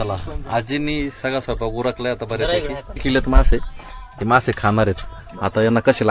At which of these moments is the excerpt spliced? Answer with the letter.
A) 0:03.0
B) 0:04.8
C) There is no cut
A